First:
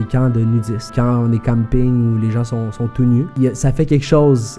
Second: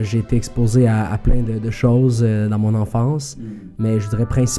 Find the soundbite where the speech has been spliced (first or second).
first